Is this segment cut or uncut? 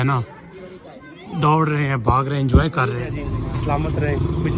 cut